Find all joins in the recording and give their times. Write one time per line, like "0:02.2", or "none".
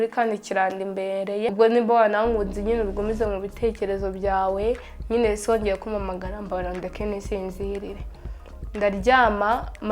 0:01.5